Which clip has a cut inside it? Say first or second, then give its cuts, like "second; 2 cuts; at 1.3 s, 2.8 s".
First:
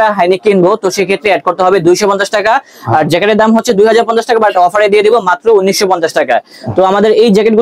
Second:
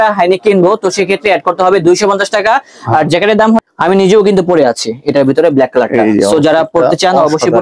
second; 1 cut; at 3.6 s